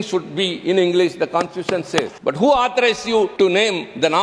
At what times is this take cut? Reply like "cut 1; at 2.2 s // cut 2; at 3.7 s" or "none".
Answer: cut 1; at 2.1 s // cut 2; at 3.3 s

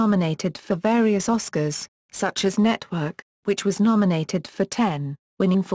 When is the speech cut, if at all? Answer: none

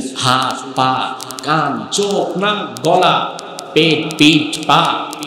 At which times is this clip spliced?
none

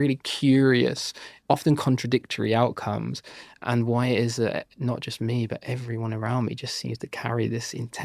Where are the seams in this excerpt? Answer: cut 1; at 1.3 s // cut 2; at 3.6 s

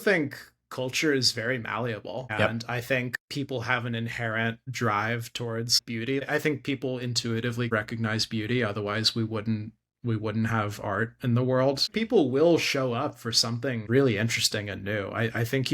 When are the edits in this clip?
cut 1; at 3.2 s // cut 2; at 6.2 s // cut 3; at 7.7 s // cut 4; at 11.9 s // cut 5; at 13.8 s

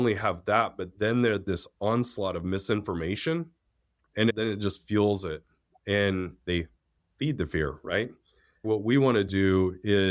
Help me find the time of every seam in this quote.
cut 1; at 4.2 s // cut 2; at 8.6 s

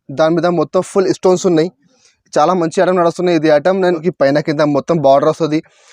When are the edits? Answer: cut 1; at 4.1 s

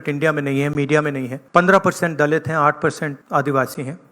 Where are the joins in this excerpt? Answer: cut 1; at 1.3 s // cut 2; at 3.2 s

